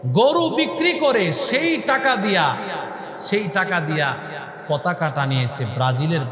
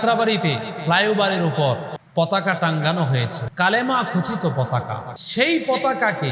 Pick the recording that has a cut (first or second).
second